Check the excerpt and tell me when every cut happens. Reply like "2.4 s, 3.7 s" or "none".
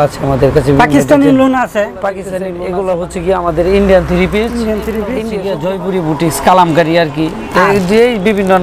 2.3 s, 5.2 s